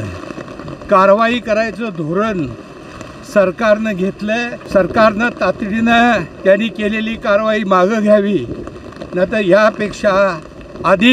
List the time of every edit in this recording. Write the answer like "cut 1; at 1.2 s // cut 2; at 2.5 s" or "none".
cut 1; at 4.6 s